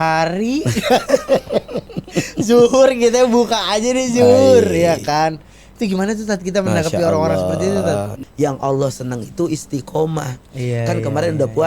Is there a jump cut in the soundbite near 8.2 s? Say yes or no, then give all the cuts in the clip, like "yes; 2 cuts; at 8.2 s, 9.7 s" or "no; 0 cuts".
yes; 1 cut; at 8.2 s